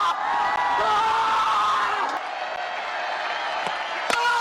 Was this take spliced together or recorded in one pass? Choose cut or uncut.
cut